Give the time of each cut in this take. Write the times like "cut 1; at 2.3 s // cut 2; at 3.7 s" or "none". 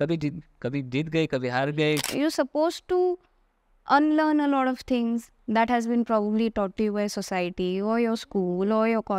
cut 1; at 2.0 s

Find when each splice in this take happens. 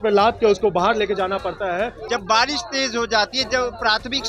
cut 1; at 2.0 s

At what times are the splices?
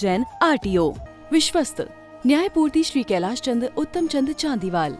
cut 1; at 1.1 s

